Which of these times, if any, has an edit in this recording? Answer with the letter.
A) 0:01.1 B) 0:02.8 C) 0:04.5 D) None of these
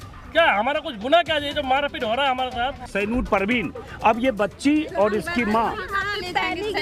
B